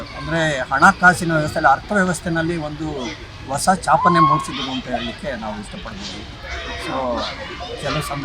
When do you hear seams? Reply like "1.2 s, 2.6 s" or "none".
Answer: none